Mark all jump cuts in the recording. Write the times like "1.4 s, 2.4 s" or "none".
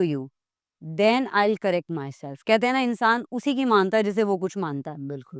none

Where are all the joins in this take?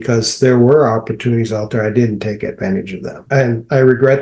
3.3 s

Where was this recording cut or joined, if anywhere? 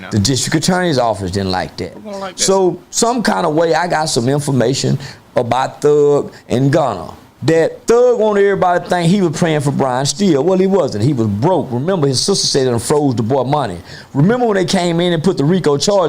7.7 s

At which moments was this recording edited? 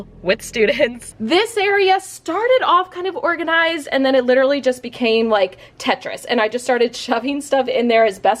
1.1 s

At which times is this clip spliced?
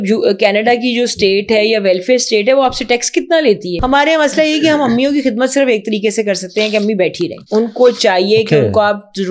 3.8 s, 7.4 s

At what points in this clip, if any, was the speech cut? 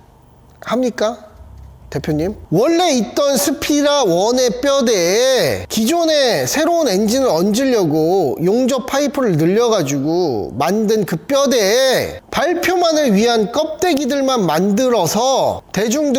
none

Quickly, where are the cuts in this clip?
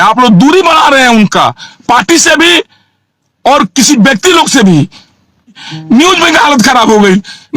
5.7 s

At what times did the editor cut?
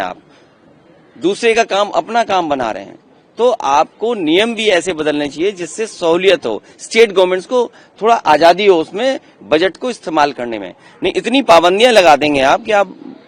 none

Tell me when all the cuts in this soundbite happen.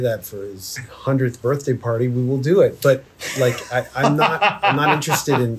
none

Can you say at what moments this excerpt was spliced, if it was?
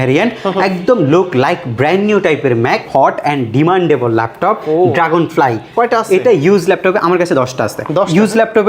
2.8 s

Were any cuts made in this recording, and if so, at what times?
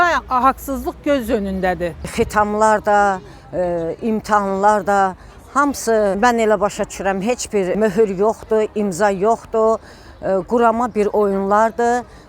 2.1 s, 6.2 s, 7.7 s

